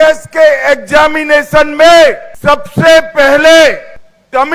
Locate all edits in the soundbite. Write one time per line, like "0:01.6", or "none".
0:02.3